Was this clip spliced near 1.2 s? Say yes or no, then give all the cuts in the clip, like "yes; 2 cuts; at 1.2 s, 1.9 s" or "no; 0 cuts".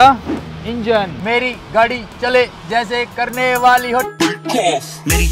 yes; 1 cut; at 1.2 s